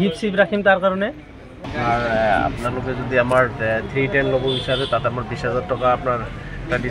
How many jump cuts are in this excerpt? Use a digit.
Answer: 1